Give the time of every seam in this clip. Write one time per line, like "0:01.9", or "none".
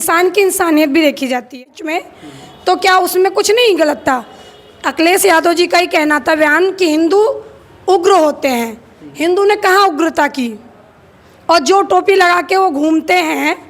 0:01.7